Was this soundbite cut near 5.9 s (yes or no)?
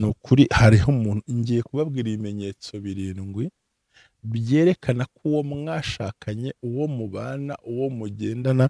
no